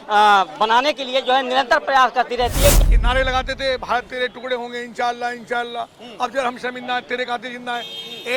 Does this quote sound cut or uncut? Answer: cut